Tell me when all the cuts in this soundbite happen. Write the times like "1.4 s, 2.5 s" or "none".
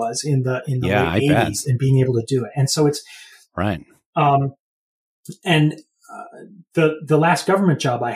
none